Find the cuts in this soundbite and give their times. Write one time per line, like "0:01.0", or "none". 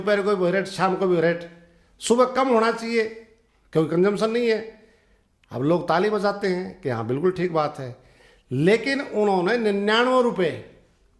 none